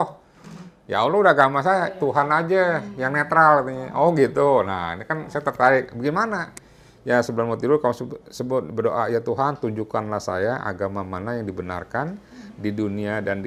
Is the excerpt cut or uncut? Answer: uncut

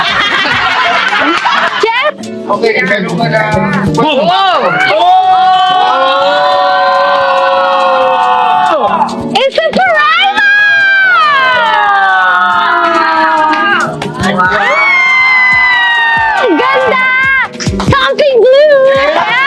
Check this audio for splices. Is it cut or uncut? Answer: uncut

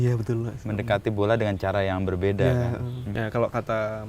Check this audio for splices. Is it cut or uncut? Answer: cut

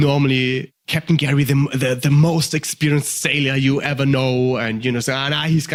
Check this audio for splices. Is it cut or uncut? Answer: uncut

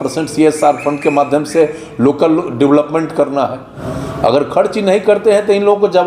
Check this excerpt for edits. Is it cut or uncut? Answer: cut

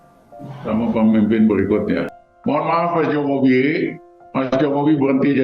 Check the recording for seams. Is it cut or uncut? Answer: cut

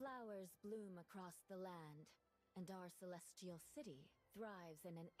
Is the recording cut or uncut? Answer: uncut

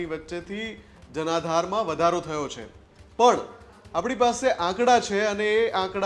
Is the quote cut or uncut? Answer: uncut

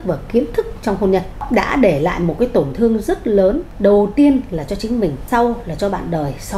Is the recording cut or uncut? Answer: cut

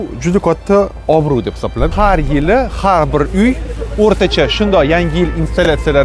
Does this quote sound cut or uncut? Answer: cut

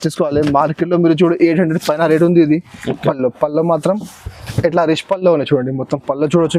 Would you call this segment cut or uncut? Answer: cut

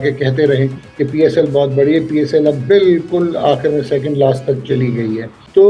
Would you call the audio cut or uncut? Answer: uncut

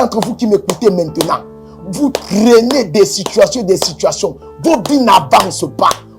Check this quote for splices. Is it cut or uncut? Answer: uncut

